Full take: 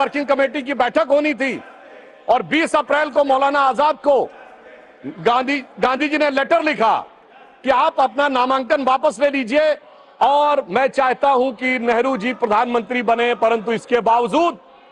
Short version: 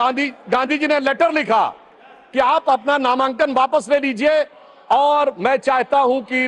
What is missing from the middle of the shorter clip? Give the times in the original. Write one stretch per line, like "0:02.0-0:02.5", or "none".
none